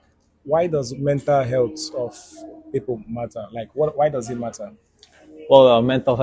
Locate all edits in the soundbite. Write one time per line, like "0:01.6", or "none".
none